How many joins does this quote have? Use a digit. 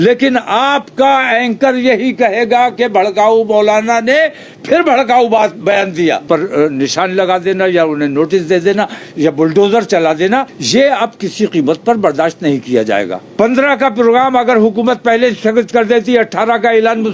3